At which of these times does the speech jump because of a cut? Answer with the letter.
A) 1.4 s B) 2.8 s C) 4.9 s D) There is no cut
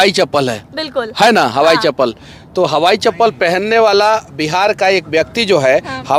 D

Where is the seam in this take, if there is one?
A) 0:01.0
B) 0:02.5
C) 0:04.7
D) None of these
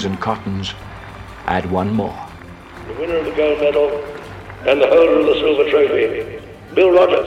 D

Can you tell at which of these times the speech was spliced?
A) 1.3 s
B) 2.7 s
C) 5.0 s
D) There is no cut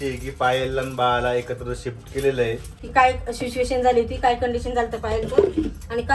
B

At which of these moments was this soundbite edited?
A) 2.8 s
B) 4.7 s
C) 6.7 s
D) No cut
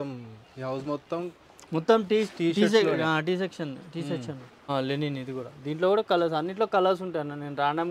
B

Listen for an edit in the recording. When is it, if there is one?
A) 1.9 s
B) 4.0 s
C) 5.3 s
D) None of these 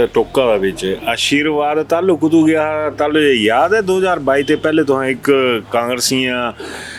D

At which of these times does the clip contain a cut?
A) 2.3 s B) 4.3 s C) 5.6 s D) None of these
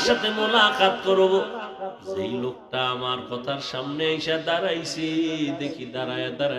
A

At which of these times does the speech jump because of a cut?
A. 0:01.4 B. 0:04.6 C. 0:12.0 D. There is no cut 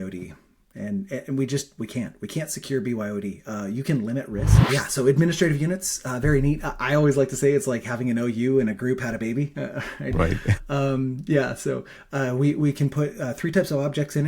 B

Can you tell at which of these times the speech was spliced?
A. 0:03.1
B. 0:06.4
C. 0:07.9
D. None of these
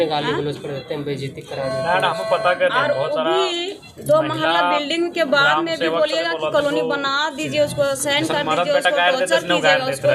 D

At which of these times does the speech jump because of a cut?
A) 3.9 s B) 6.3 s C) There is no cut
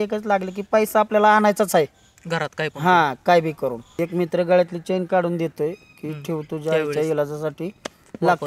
A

